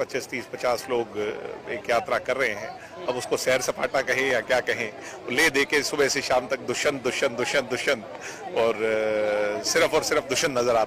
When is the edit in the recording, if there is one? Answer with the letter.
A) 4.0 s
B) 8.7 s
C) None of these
C